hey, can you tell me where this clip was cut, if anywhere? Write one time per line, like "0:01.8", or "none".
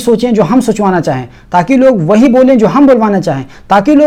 none

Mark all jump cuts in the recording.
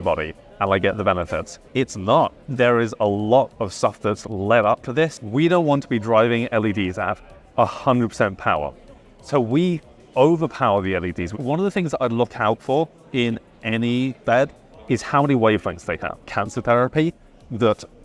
0:01.6
0:05.2
0:11.3
0:14.2
0:16.4

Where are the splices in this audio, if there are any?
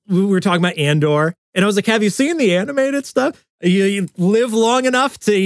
0:01.4

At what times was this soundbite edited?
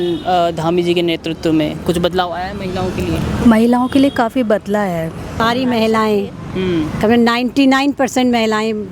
0:05.4

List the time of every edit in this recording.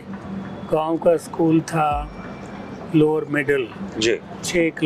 none

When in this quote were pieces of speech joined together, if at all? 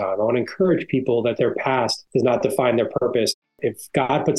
0:01.6
0:03.4

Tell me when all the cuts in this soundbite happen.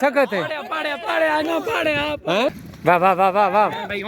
0:02.7

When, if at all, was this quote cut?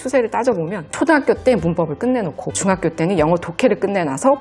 none

